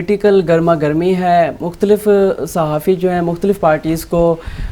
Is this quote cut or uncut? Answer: uncut